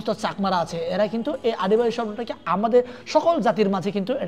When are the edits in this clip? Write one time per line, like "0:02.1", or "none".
none